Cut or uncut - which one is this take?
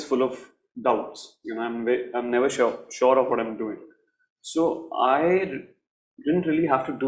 uncut